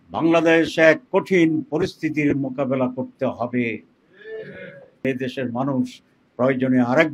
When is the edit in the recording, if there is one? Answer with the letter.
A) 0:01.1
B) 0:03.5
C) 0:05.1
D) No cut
C